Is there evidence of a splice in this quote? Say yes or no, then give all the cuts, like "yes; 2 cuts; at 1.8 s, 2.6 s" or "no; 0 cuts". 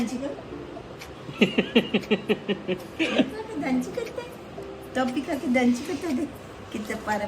no; 0 cuts